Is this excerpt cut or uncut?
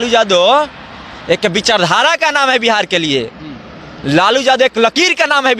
uncut